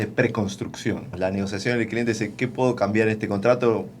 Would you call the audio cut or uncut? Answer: cut